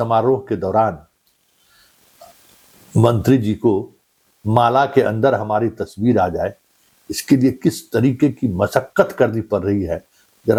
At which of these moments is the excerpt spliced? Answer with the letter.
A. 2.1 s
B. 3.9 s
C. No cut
C